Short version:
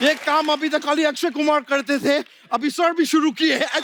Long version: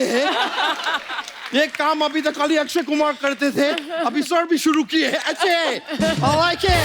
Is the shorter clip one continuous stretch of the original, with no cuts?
yes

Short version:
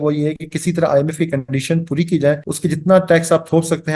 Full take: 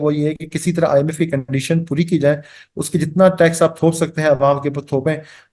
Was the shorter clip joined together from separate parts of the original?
yes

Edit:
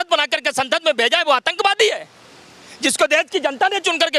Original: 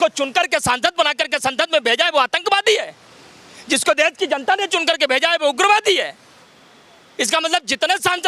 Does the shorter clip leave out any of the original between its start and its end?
no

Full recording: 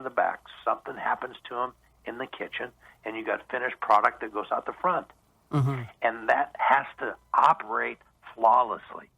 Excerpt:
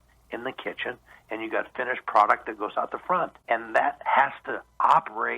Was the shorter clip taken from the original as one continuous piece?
no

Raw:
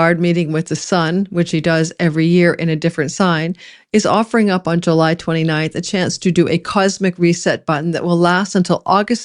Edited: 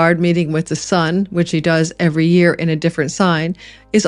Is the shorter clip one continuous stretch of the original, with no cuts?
yes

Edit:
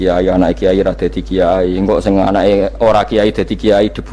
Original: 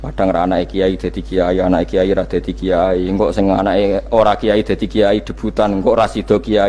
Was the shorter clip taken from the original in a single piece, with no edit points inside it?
yes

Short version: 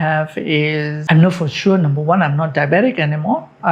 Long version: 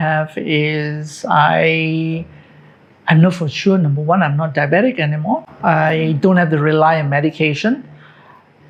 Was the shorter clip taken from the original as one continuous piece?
no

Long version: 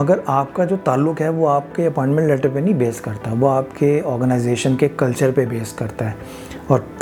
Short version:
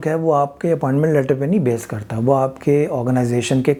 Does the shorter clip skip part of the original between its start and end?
no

